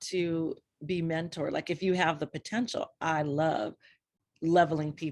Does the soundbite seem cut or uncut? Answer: uncut